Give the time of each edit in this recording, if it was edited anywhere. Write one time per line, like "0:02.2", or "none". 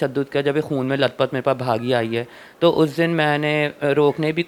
none

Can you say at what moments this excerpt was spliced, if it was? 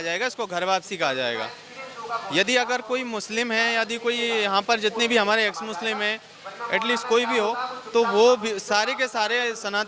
none

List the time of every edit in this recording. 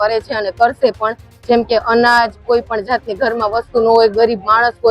none

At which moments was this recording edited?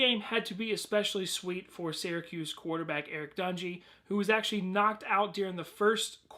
0:03.2

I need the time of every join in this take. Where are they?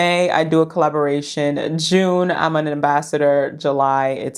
none

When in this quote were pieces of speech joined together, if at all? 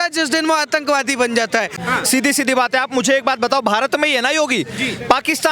0:01.8

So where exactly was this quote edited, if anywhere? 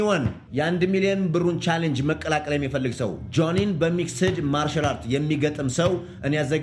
none

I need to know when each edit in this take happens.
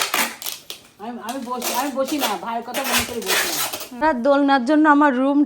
0:04.0

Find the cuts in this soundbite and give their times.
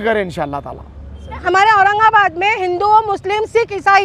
0:01.4

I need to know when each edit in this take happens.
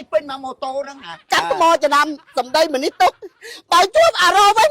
0:01.2

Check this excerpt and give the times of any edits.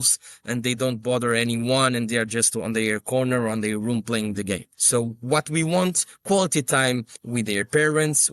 0:04.7
0:06.1

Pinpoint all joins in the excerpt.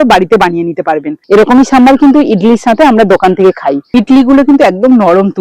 0:01.1
0:03.8

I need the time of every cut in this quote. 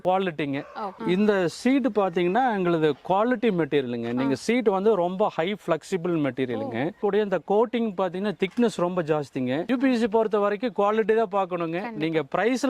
0:00.9
0:07.0
0:09.6

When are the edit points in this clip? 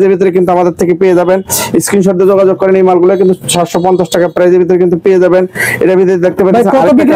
none

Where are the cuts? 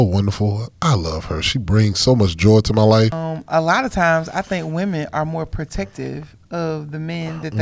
0:03.2

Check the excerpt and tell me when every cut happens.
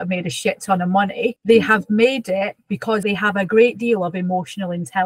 0:01.4
0:03.0

